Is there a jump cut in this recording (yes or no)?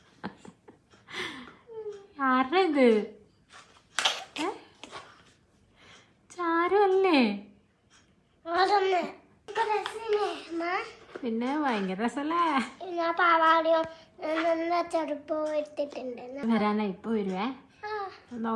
yes